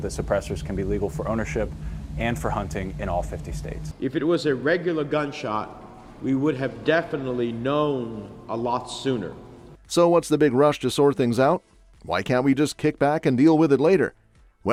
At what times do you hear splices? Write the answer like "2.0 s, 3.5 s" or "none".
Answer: none